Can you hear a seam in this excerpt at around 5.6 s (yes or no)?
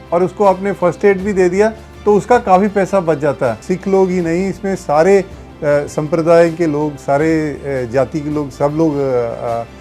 no